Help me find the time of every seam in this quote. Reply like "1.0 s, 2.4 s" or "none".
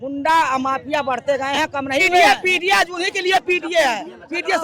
2.2 s